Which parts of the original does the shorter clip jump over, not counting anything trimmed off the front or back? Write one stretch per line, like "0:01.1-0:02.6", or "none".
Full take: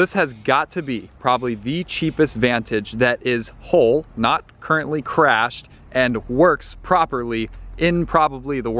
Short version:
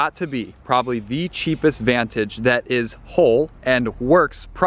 0:04.1-0:05.8